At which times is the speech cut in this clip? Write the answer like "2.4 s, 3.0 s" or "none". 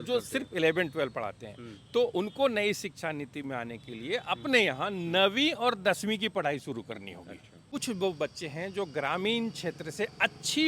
7.6 s